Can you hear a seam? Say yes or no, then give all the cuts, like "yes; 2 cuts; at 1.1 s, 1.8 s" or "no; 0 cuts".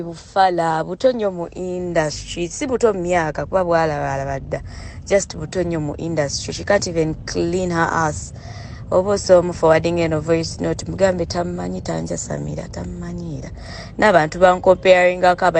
no; 0 cuts